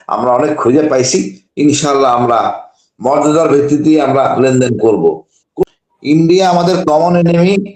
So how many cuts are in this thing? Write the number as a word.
one